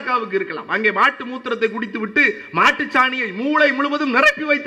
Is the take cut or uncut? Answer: uncut